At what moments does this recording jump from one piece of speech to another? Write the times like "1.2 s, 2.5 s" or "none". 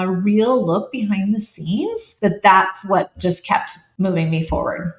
2.1 s, 3.8 s